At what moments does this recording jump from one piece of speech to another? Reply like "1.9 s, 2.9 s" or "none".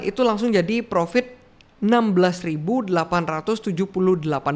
none

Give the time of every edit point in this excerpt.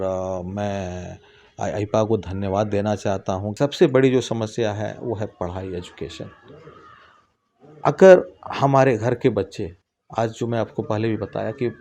3.5 s

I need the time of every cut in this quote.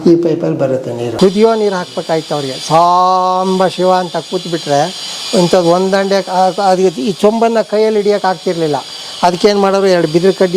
1.1 s

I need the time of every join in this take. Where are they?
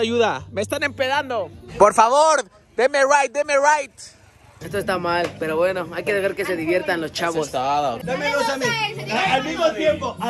4.6 s, 8.0 s

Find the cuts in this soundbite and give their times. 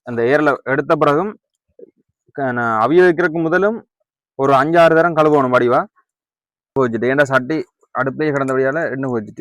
6.8 s

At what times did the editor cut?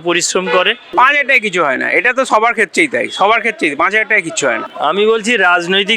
0.9 s, 4.7 s

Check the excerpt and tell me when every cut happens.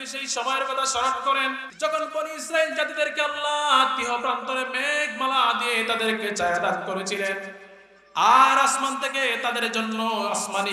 1.7 s

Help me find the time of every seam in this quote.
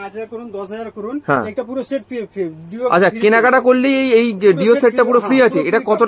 none

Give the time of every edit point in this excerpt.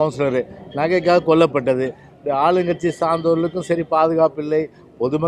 none

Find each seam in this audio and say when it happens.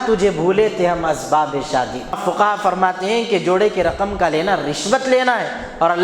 2.1 s

